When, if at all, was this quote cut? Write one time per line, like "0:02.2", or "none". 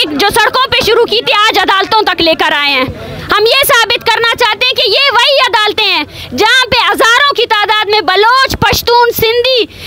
none